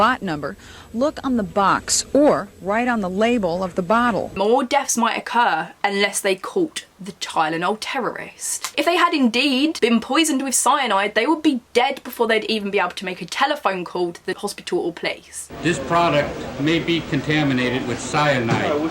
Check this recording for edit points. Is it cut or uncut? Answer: cut